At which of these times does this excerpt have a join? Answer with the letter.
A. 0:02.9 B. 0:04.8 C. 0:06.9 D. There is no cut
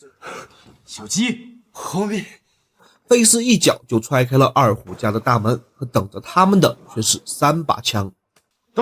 A